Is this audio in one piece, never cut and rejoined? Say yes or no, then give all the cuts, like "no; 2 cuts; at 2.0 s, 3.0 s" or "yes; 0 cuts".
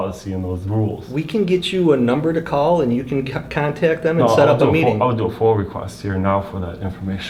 yes; 0 cuts